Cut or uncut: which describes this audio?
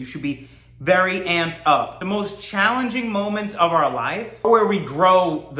cut